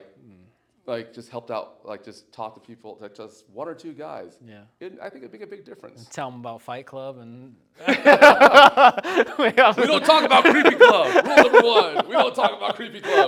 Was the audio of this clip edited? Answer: no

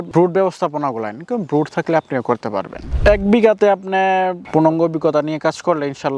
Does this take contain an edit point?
yes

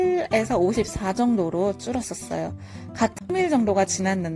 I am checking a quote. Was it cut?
yes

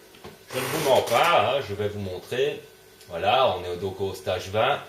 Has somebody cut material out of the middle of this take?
yes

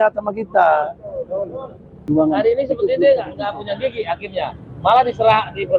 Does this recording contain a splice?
yes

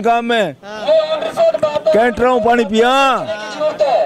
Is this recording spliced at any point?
no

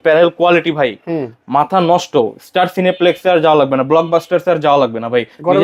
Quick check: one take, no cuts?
yes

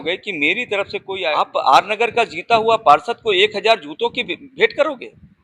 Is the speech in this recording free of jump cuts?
no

